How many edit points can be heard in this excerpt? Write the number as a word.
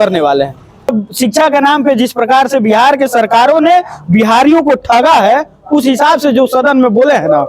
one